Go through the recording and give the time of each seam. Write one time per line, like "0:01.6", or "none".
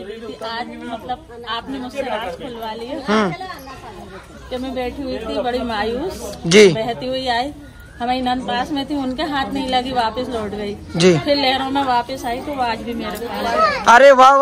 none

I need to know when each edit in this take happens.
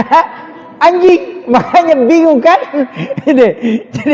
none

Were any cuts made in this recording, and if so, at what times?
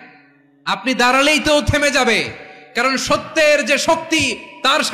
none

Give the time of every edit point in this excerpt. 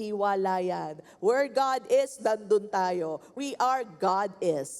0:03.3

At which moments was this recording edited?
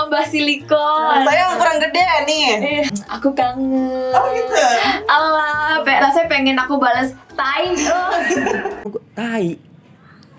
0:03.0

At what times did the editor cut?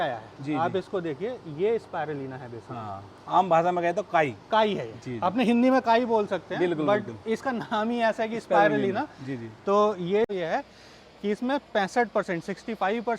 0:10.3

